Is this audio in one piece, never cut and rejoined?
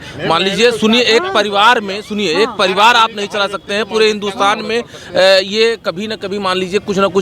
yes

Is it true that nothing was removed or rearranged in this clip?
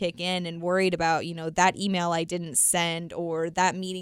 yes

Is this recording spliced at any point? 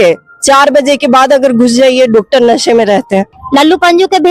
yes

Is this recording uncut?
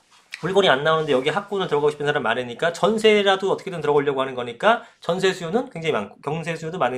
yes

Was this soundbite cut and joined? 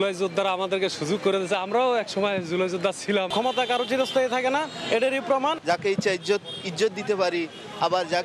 no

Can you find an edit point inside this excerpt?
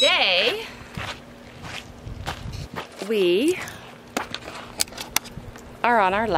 no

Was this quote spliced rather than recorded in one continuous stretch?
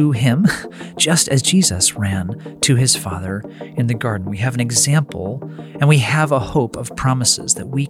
no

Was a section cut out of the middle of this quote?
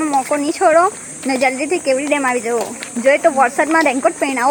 no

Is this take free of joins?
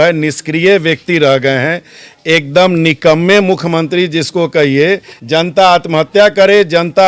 no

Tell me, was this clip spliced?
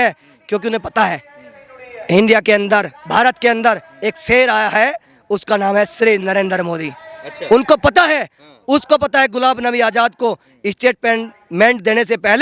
no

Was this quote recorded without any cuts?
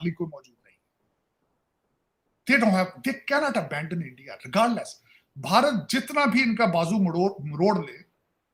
yes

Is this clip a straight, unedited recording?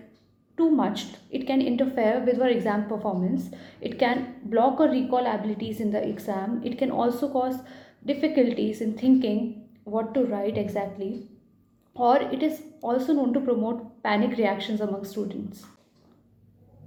yes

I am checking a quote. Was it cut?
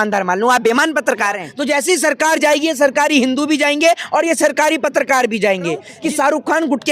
yes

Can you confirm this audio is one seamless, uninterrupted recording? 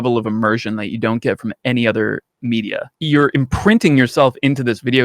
no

